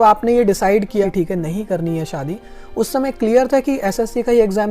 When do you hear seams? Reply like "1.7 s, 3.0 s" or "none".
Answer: 1.0 s